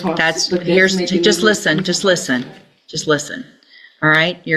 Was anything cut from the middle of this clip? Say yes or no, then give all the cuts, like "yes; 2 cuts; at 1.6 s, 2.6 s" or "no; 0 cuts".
no; 0 cuts